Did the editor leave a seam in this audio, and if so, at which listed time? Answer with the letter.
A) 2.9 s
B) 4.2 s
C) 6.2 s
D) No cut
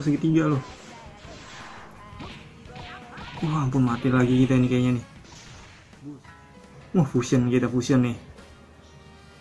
C